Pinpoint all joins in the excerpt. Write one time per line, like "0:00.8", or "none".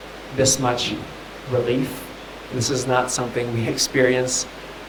none